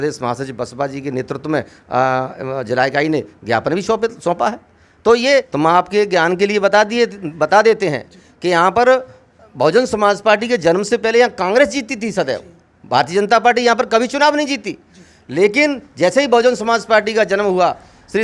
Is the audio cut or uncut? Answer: cut